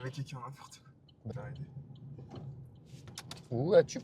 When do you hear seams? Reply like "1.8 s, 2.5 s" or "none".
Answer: 1.3 s